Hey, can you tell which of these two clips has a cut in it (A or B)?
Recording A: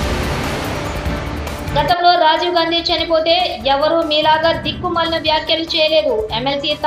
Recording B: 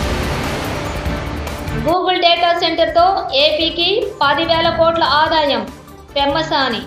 A